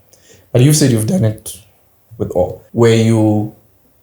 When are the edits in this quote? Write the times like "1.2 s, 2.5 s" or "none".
2.6 s